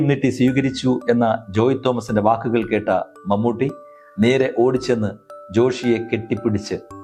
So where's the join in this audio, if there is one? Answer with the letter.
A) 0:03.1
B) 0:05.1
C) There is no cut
C